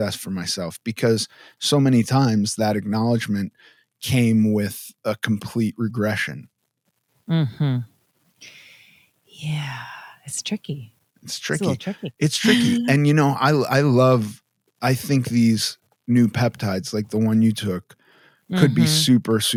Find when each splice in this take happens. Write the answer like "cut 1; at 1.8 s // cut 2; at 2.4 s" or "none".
none